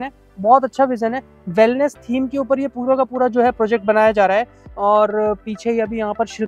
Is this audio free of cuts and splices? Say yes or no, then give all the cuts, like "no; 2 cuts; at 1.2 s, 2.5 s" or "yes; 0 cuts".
no; 1 cut; at 4.6 s